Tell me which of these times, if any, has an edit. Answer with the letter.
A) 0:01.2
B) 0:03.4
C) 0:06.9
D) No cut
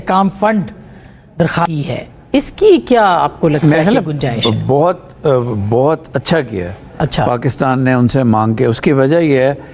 D